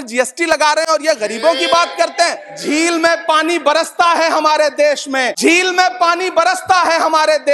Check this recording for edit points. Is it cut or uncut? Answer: cut